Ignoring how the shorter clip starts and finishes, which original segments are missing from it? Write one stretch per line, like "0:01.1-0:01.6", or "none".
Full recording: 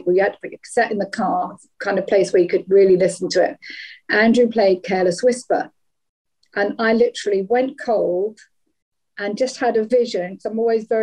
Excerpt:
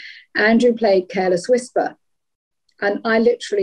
none